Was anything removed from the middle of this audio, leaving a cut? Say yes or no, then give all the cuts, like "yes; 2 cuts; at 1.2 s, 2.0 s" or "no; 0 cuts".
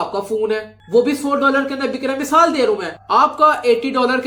no; 0 cuts